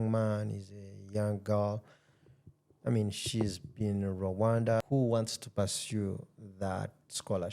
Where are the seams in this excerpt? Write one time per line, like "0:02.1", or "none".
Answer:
0:04.8

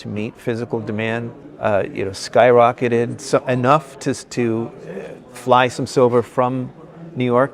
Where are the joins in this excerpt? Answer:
0:01.4

